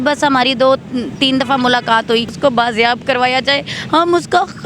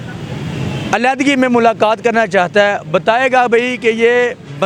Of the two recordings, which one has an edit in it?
first; 1 cut; at 2.3 s

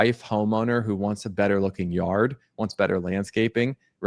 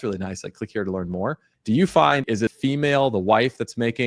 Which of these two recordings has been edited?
second; 2 cuts; at 1.5 s, 2.4 s

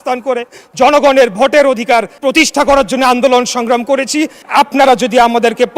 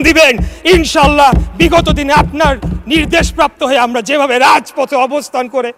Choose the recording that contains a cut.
first; 2 cuts; at 2.1 s, 4.4 s

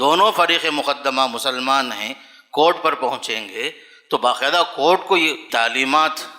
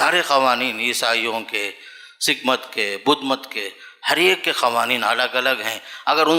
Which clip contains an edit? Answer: first; 1 cut; at 5.4 s

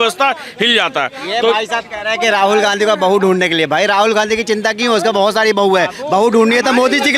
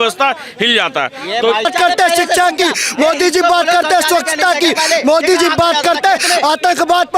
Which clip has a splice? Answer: second; 1 cut; at 1.7 s

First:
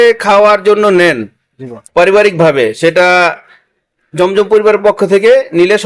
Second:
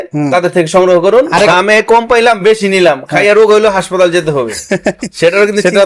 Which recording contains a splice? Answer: second; 1 cut; at 1.5 s

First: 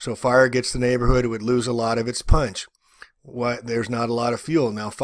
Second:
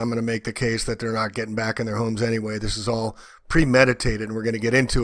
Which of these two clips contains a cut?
second; 1 cut; at 1.9 s

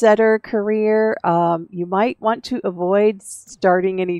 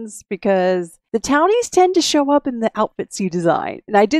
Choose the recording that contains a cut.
second; 1 cut; at 1.0 s

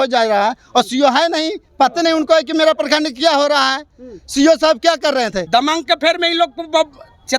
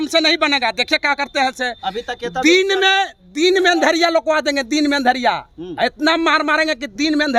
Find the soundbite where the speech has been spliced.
first; 1 cut; at 5.4 s

